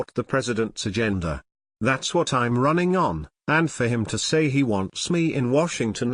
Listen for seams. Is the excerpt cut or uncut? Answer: uncut